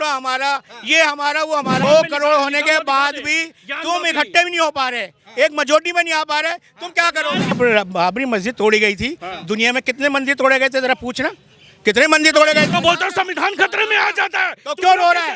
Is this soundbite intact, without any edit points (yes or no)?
no